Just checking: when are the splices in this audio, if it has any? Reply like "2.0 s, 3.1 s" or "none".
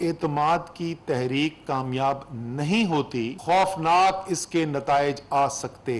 3.3 s

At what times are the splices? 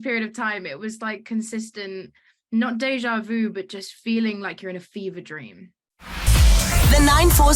6.0 s

